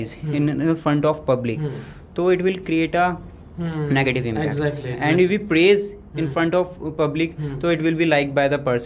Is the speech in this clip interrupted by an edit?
no; 0 cuts

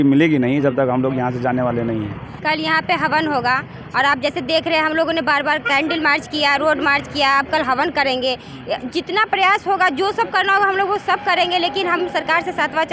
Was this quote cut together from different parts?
yes; 1 cut; at 2.2 s

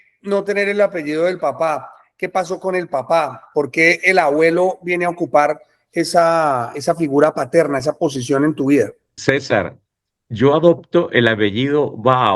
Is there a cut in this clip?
yes; 1 cut; at 9.1 s

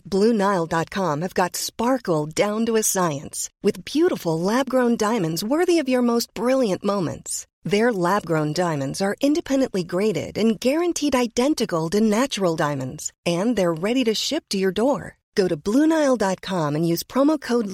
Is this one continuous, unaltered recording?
yes; 0 cuts

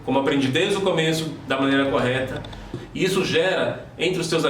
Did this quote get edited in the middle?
yes; 1 cut; at 2.8 s

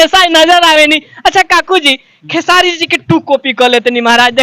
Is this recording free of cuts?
yes; 0 cuts

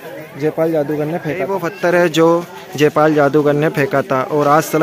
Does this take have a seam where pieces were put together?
yes; 1 cut; at 1.7 s

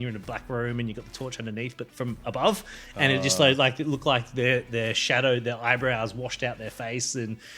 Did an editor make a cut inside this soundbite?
no; 0 cuts

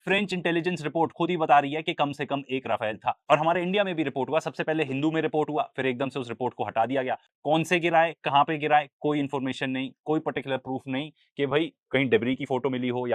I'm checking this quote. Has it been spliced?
yes; 1 cut; at 7.3 s

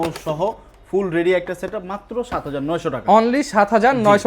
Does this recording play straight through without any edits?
yes; 0 cuts

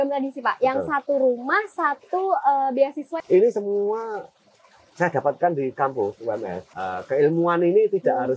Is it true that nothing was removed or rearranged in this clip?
no; 2 cuts; at 3.0 s, 6.6 s

